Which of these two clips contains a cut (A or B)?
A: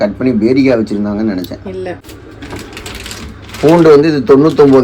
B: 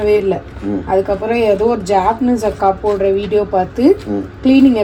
A